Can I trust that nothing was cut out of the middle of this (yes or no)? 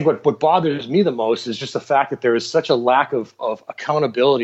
yes